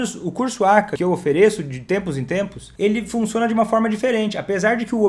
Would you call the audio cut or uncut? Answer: cut